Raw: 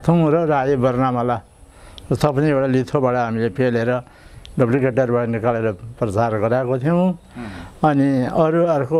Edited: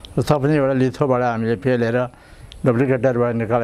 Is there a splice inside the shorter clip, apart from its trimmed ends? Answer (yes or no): no